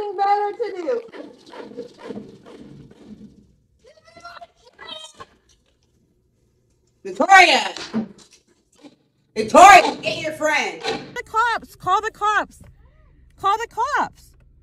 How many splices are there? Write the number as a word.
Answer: one